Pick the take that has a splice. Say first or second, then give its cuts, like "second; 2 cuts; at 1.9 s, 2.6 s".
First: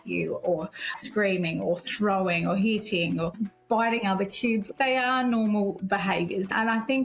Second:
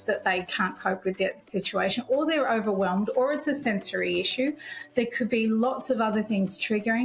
first; 2 cuts; at 3.4 s, 4.7 s